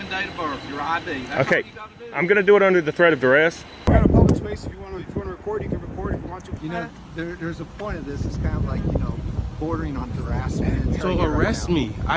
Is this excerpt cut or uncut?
cut